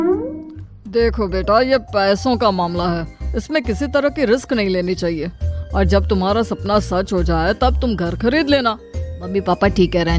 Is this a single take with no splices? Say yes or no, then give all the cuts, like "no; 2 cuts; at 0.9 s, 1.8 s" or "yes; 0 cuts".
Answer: no; 1 cut; at 9.3 s